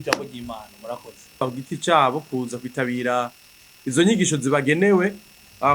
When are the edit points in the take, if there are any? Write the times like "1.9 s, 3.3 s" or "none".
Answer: 1.4 s